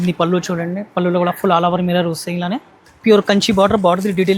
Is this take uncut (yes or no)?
no